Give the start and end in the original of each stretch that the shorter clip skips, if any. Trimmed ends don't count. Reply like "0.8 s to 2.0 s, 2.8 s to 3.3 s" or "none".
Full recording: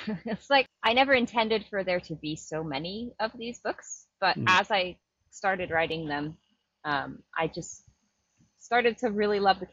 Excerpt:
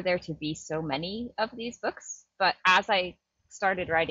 none